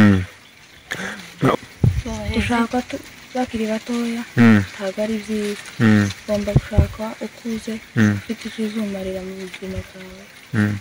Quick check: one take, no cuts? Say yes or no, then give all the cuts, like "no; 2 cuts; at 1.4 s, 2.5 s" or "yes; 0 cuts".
no; 1 cut; at 1.6 s